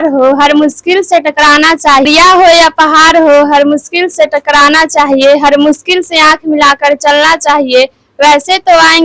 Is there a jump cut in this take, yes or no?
yes